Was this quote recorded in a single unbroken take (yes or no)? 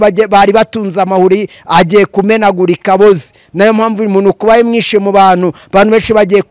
yes